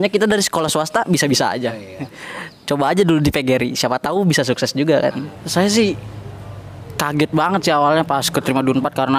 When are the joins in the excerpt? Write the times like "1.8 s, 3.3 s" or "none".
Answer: 2.1 s, 5.4 s